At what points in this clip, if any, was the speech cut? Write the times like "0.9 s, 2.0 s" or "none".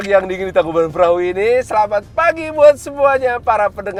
none